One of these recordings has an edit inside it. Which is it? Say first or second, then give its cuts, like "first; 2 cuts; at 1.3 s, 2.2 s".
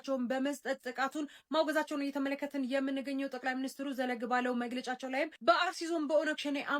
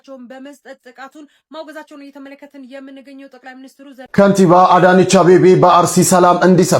second; 1 cut; at 4.1 s